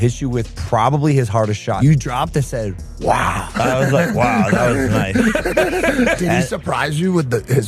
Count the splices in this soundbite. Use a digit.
2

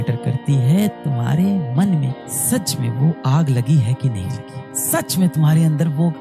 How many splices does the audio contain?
0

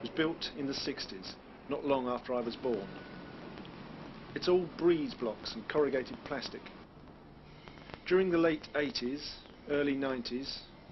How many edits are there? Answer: 1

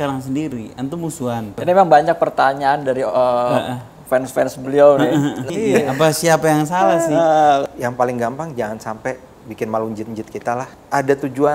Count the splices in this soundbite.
4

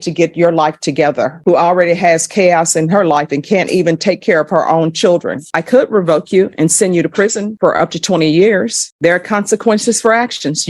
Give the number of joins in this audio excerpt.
3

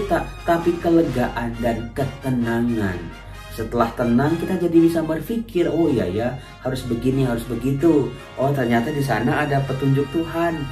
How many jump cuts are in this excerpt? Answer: 0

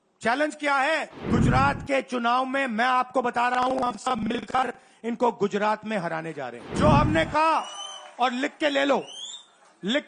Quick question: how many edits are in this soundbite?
2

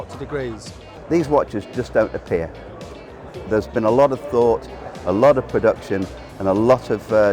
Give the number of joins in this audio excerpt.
1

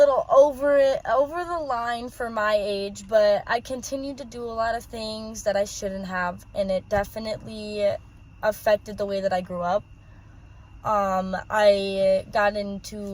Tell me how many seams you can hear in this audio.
0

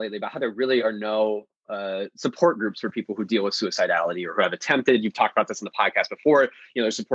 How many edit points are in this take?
0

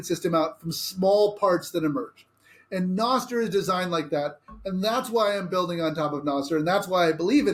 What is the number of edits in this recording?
0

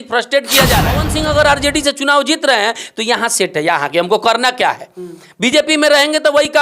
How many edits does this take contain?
1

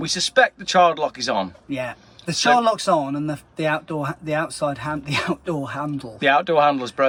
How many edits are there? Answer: 0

